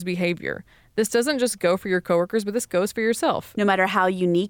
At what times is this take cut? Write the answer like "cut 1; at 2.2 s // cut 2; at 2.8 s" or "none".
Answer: cut 1; at 3.5 s